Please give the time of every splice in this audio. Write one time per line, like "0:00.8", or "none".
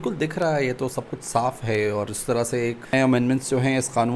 0:02.9